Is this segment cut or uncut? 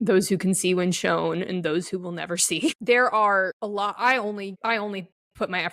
cut